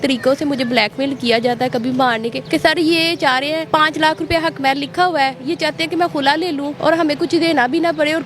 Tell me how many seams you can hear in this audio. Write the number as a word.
three